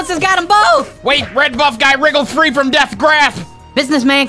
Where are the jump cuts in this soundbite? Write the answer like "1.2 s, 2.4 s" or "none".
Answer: none